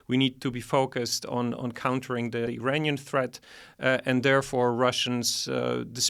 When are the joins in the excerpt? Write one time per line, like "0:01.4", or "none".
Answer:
none